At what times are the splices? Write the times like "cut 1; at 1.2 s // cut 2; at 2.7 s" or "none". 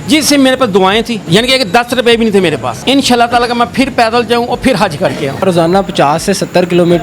cut 1; at 1.2 s // cut 2; at 2.7 s // cut 3; at 5.4 s